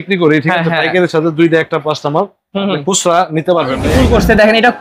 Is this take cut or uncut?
cut